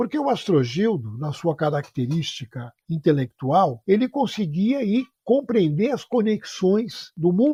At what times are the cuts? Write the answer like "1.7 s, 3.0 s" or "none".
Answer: none